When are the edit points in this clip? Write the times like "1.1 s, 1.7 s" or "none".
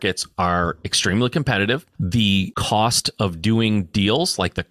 2.4 s